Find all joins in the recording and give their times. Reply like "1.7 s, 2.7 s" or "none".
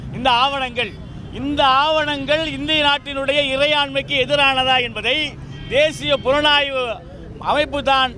none